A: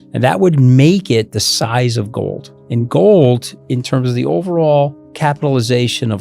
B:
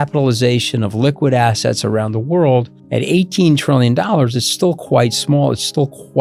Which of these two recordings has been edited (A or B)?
A